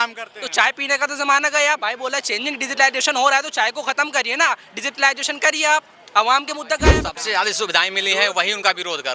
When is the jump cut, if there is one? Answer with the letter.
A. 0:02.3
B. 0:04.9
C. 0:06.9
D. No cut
C